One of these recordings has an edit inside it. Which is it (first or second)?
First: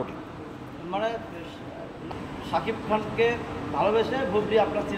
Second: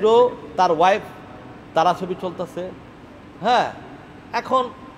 first